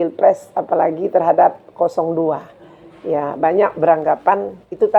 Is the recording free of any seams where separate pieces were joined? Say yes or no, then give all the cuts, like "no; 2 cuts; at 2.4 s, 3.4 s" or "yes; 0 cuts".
yes; 0 cuts